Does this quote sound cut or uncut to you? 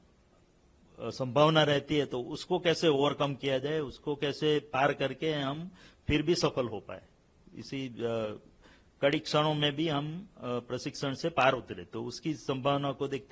uncut